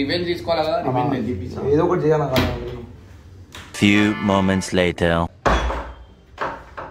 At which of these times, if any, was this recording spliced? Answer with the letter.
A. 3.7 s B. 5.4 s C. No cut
A